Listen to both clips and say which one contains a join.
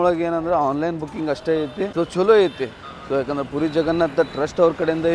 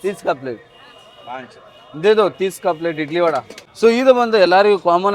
second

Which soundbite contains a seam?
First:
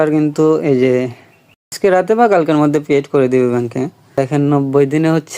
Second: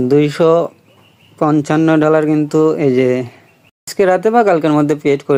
first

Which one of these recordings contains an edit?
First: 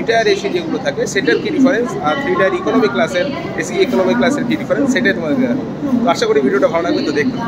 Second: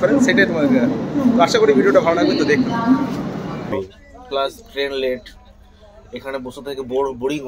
second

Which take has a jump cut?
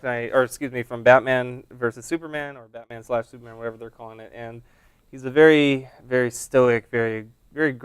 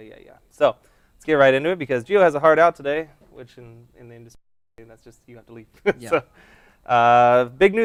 first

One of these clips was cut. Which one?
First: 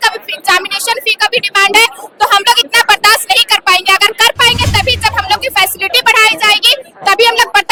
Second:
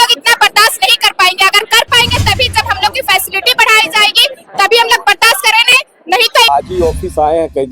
second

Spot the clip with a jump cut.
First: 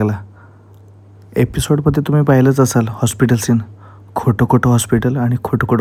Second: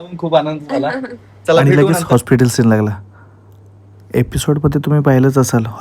second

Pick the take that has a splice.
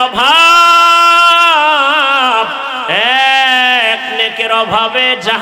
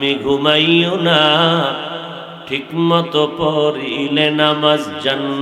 first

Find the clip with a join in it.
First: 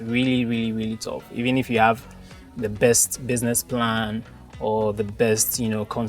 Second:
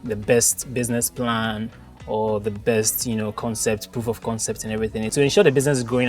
second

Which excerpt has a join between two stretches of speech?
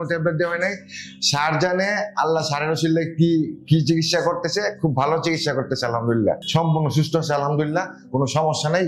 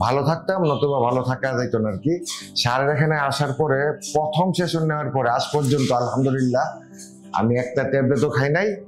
first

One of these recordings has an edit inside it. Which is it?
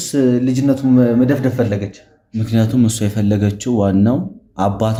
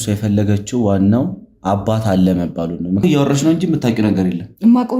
second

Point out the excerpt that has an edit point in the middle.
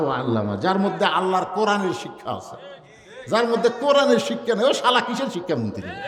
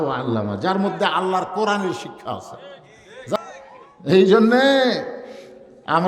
second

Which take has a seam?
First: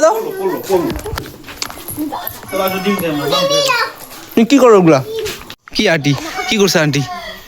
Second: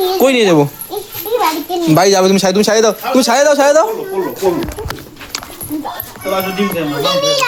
first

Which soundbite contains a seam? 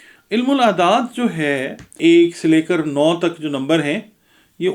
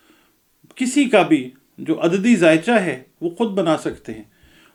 first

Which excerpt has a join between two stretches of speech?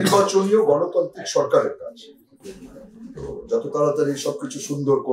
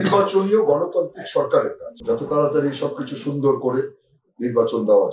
second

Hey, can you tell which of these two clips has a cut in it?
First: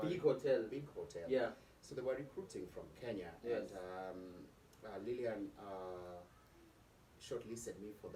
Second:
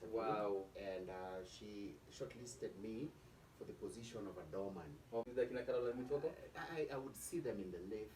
second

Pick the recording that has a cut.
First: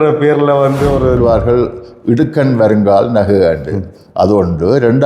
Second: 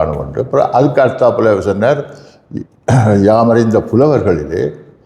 first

